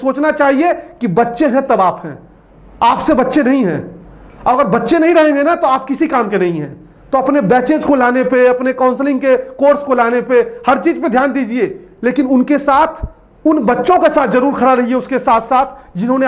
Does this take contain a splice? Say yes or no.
no